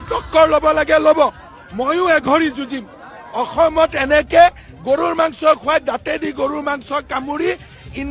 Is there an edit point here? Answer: no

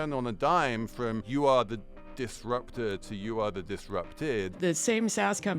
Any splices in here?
yes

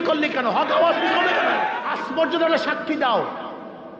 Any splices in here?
yes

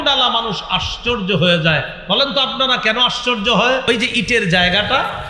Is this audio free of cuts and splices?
no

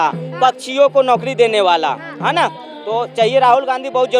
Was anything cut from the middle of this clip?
no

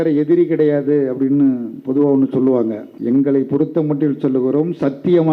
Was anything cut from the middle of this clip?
yes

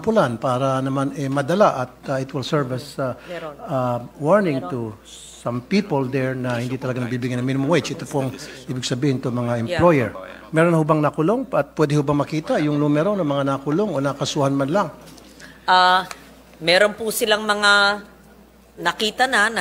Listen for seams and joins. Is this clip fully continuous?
yes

